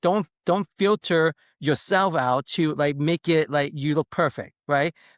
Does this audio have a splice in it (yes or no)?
no